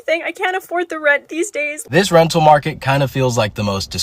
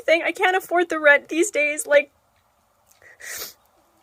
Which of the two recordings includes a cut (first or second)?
first